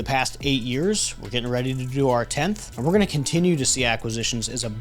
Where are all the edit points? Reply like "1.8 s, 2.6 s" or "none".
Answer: 2.7 s